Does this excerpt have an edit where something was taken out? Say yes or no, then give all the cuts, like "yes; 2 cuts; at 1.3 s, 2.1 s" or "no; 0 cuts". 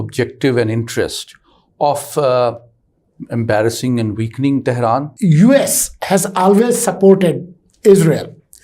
yes; 1 cut; at 5.1 s